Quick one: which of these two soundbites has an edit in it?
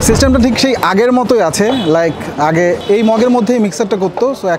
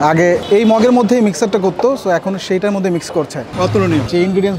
second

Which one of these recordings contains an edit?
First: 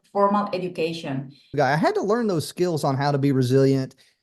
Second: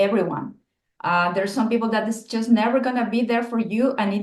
first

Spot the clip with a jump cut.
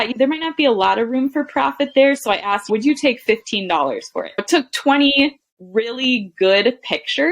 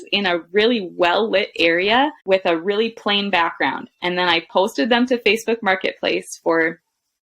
first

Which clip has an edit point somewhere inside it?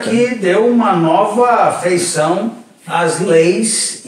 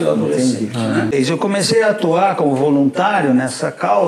second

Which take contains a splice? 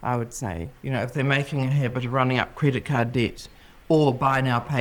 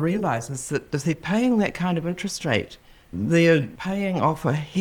second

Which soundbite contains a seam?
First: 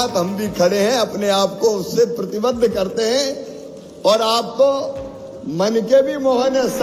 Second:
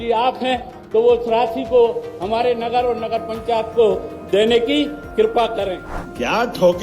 second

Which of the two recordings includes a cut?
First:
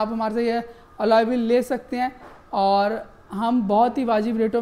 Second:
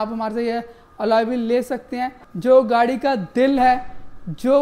second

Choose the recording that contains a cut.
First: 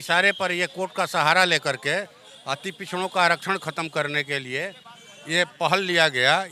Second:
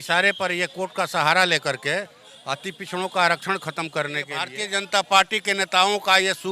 second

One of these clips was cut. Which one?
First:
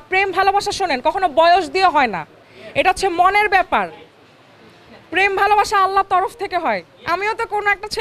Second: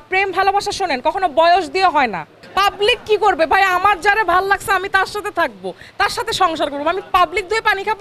second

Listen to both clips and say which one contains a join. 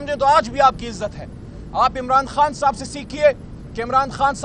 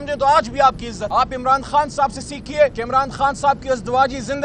second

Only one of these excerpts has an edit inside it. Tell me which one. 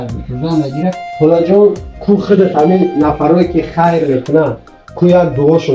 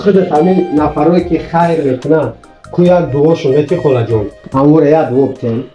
first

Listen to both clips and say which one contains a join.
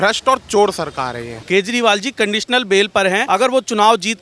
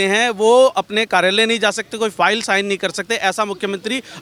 first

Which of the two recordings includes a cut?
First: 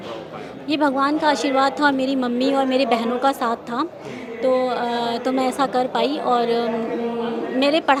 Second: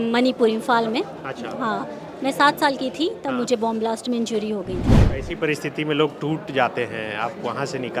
second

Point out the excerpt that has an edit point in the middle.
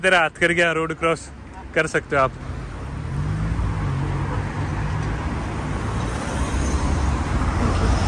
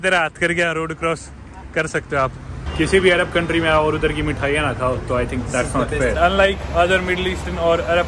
second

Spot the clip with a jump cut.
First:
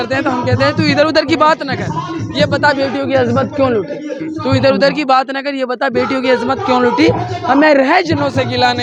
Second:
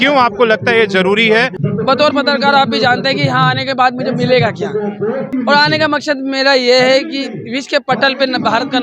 second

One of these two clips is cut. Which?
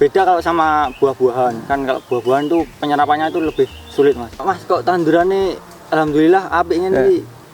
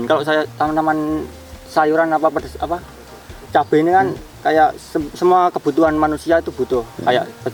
first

